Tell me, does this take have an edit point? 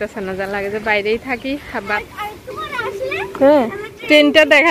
yes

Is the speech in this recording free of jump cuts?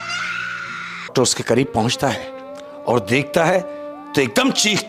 no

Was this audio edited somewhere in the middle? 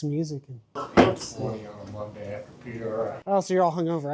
no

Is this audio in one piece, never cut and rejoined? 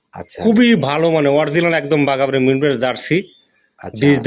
yes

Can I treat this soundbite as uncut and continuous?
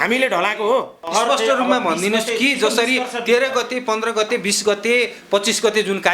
no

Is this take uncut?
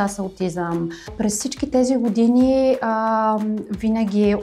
no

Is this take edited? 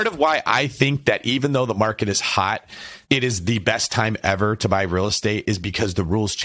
no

